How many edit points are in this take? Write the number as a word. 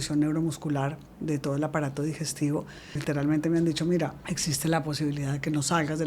two